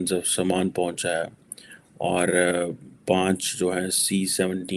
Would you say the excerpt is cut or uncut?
uncut